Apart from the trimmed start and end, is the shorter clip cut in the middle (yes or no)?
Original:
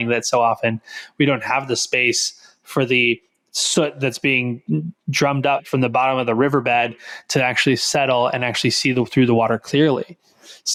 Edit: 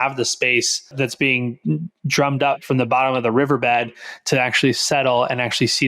yes